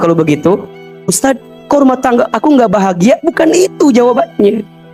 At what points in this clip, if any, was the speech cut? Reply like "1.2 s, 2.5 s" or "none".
1.2 s